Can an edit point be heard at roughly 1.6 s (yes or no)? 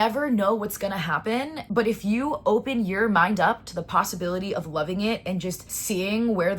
yes